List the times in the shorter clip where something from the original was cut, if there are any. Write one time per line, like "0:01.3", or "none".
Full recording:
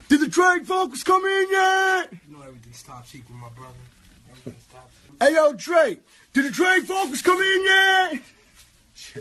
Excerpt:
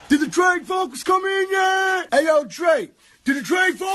0:02.0